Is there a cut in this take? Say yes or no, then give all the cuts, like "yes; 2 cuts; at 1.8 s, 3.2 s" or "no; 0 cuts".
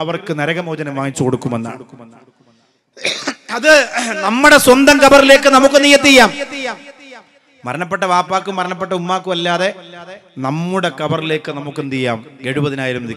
no; 0 cuts